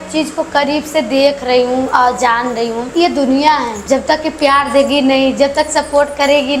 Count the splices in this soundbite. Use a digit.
2